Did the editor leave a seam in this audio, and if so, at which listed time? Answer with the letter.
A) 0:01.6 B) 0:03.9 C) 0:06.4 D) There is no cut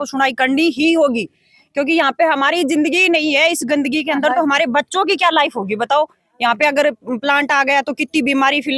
D